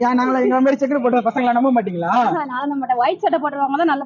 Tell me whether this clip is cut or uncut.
uncut